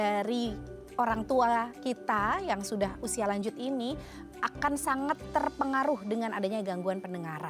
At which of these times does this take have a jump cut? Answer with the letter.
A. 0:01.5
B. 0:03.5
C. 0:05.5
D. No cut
D